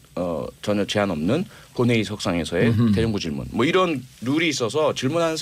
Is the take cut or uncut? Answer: uncut